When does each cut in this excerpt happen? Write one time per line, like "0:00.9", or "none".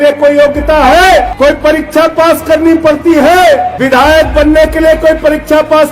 0:01.3
0:03.7